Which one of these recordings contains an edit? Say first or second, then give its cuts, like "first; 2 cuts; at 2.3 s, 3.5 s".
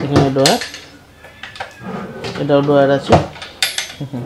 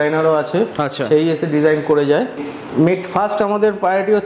second; 1 cut; at 2.4 s